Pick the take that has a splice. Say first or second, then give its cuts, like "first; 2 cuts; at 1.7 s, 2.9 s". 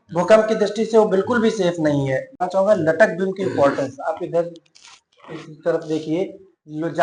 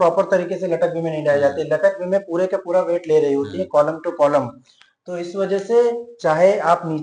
first; 1 cut; at 2.5 s